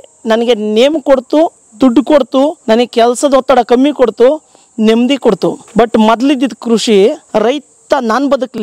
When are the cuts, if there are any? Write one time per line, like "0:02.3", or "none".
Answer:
0:02.6
0:05.6
0:07.2